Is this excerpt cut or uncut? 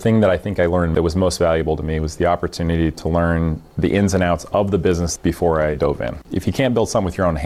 cut